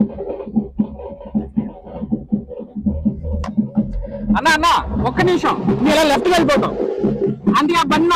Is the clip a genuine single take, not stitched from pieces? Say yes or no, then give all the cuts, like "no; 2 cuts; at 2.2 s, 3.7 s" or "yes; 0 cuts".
yes; 0 cuts